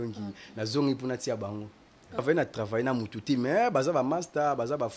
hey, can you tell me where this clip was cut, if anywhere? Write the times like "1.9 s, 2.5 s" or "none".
2.2 s